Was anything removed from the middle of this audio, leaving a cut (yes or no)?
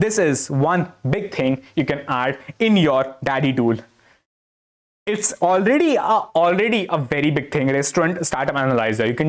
no